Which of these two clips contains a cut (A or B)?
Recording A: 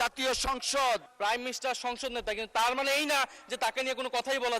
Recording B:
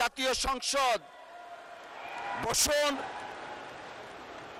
A